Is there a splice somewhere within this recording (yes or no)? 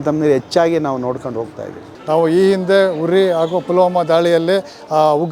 yes